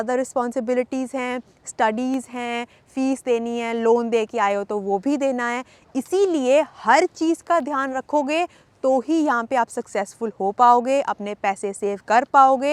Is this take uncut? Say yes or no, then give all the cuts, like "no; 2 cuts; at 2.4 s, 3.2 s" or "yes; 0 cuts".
yes; 0 cuts